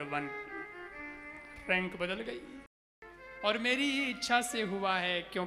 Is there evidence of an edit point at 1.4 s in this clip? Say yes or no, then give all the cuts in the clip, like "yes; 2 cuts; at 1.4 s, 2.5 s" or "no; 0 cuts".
no; 1 cut; at 2.7 s